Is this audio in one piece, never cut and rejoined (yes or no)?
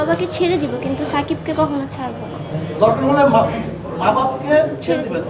yes